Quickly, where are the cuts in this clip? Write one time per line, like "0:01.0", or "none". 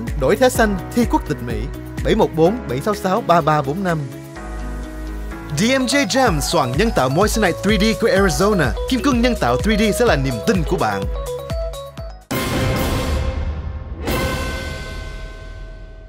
0:12.2